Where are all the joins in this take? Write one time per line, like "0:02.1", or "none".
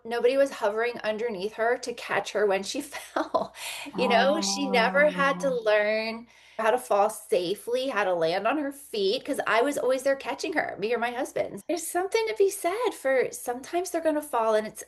0:06.6
0:11.6